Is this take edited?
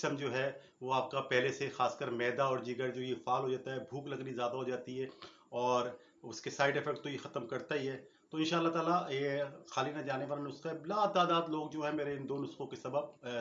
no; 0 cuts

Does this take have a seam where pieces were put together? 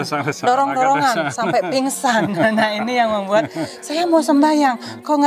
no; 0 cuts

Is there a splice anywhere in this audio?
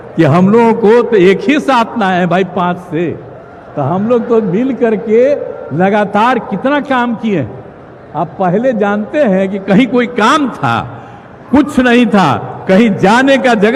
no; 0 cuts

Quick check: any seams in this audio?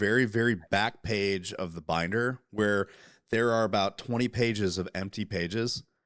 no; 0 cuts

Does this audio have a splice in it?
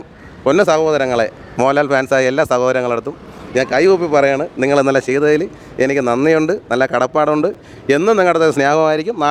no; 0 cuts

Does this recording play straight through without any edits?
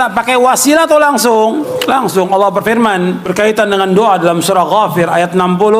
no; 2 cuts; at 1.7 s, 3.2 s

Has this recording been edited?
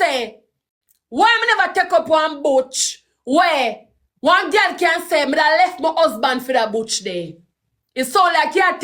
no; 0 cuts

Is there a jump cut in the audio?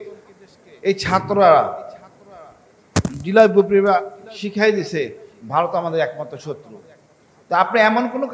no; 0 cuts

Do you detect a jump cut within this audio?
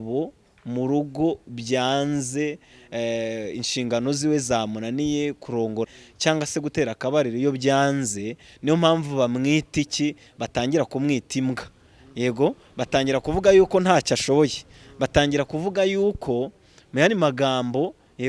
yes; 1 cut; at 5.9 s

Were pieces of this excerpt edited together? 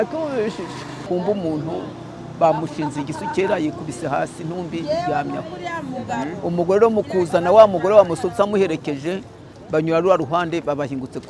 yes; 1 cut; at 1.0 s

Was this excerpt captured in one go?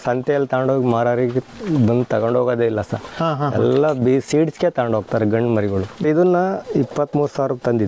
no; 1 cut; at 6.0 s

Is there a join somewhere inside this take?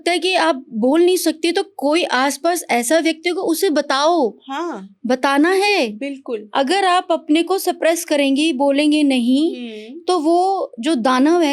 no; 0 cuts

